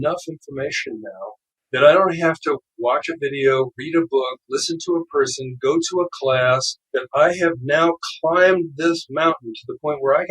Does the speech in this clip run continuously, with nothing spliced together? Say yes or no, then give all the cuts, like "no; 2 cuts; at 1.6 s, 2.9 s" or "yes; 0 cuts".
no; 2 cuts; at 1.5 s, 6.8 s